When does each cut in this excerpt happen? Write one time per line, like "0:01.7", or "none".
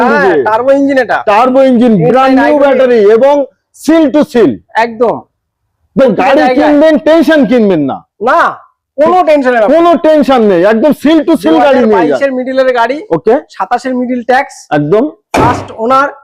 none

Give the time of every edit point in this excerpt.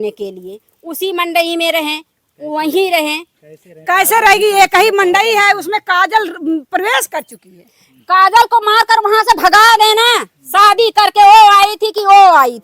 none

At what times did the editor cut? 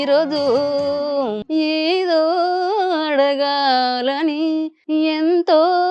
0:01.4
0:04.8

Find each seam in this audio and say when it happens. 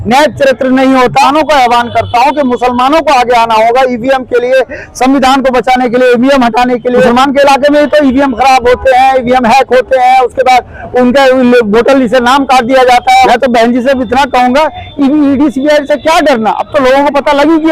0:01.2
0:07.1
0:13.3

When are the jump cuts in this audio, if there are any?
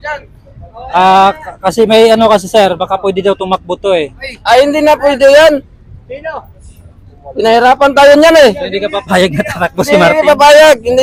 none

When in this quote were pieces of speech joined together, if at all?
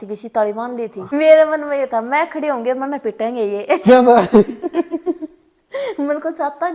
0:01.1

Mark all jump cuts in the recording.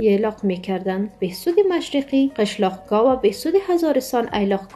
0:01.1

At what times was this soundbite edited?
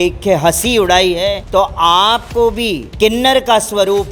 0:01.4
0:02.8

